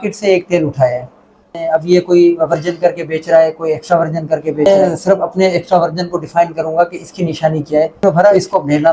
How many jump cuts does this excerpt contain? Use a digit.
3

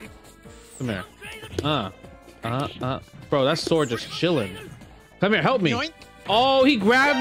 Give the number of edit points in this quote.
0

